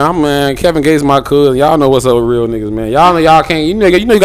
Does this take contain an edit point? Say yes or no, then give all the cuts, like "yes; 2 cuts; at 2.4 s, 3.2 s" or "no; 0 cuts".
no; 0 cuts